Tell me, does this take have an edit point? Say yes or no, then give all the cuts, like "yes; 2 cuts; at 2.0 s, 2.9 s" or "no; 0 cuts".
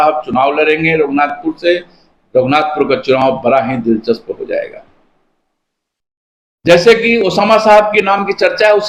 no; 0 cuts